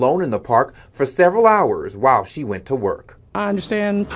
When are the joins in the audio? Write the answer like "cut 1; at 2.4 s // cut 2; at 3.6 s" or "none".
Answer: cut 1; at 2.6 s